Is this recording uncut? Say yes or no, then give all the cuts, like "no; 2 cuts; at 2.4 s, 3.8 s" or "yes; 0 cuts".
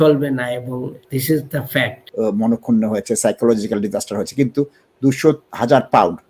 no; 3 cuts; at 1.0 s, 2.0 s, 5.5 s